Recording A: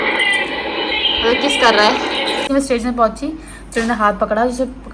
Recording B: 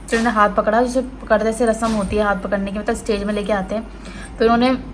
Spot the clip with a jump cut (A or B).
A